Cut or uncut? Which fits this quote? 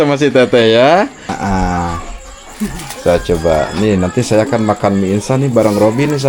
cut